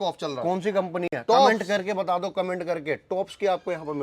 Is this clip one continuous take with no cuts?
yes; 0 cuts

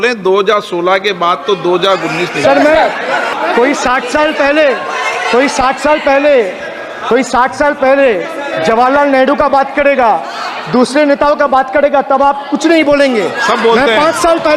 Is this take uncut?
no; 1 cut; at 3.3 s

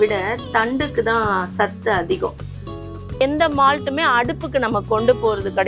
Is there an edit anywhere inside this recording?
yes; 1 cut; at 2.6 s

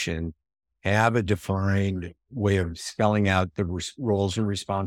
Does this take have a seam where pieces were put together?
no; 0 cuts

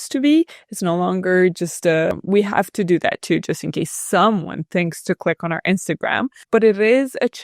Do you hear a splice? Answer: yes; 1 cut; at 2.2 s

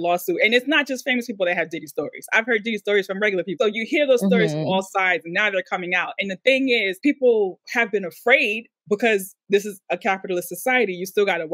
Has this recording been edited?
yes; 2 cuts; at 3.6 s, 6.9 s

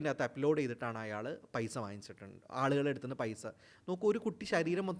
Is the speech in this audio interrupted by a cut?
no; 0 cuts

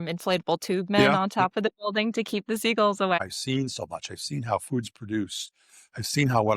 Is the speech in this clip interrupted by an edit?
yes; 1 cut; at 3.2 s

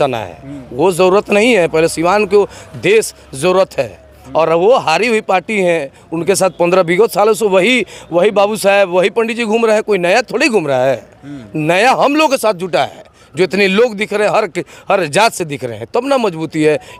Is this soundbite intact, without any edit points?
yes; 0 cuts

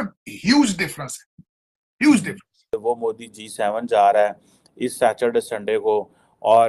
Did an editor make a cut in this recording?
yes; 1 cut; at 2.7 s

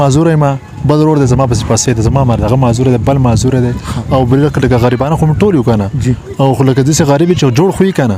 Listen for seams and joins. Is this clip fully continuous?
yes; 0 cuts

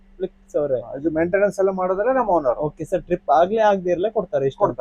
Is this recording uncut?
yes; 0 cuts

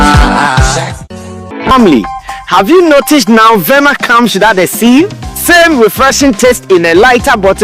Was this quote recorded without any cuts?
yes; 0 cuts

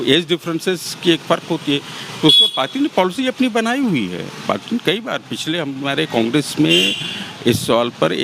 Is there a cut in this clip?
no; 0 cuts

